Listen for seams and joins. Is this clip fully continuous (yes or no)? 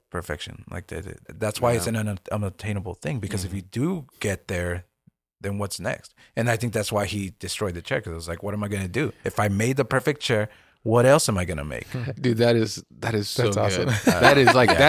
no